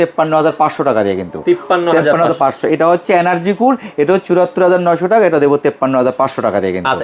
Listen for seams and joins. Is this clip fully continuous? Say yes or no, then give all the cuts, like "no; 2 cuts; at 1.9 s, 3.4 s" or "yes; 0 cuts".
yes; 0 cuts